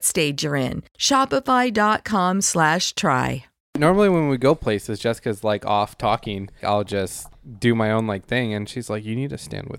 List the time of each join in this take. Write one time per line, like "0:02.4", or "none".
0:03.8
0:06.6
0:07.4